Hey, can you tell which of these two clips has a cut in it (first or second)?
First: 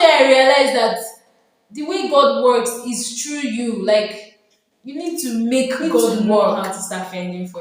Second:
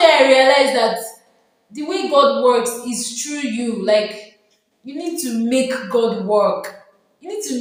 first